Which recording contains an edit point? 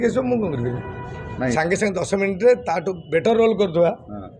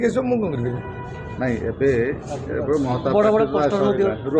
first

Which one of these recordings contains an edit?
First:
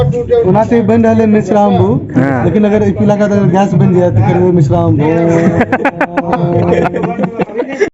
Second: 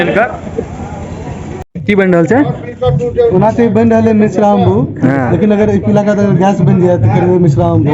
second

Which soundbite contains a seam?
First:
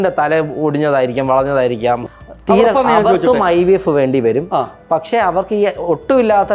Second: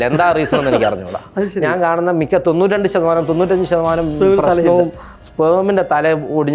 first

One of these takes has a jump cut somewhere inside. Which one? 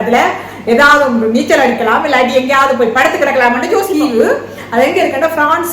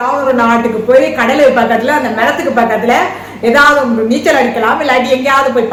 first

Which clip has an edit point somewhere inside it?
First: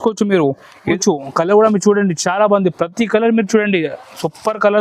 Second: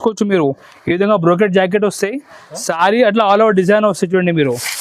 first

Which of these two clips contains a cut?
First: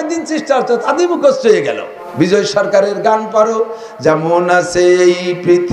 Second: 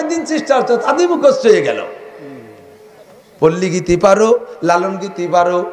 first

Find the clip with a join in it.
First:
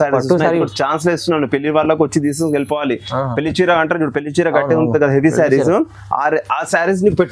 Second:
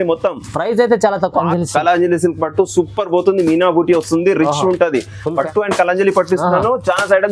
second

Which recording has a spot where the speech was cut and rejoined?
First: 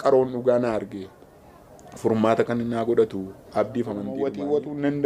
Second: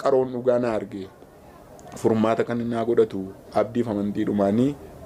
first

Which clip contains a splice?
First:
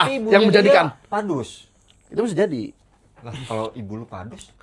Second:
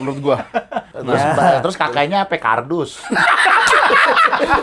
second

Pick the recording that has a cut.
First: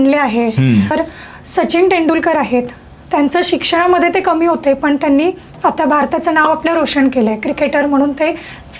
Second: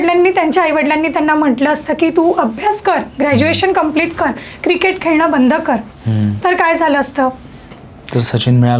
first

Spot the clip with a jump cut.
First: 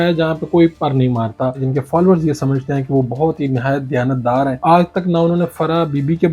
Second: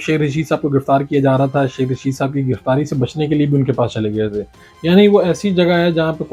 first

